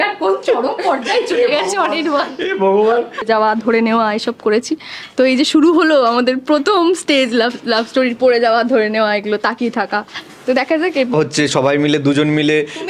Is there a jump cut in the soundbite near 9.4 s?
no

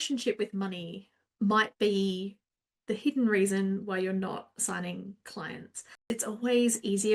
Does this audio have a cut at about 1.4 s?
no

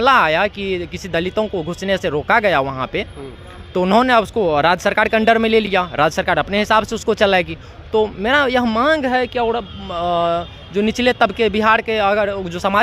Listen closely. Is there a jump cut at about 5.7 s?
no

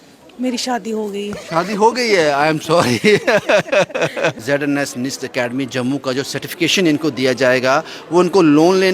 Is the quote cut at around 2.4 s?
no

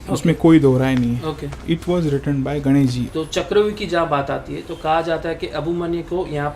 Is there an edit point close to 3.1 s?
yes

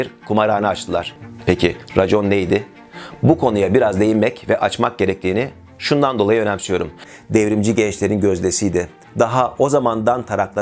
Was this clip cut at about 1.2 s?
yes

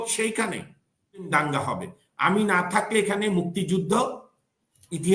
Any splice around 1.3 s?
yes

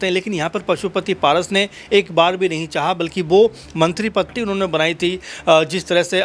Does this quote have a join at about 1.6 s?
no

